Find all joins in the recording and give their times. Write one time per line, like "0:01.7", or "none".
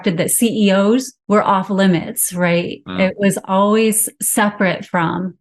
0:01.1